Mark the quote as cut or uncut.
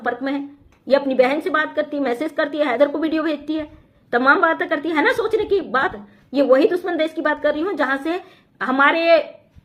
uncut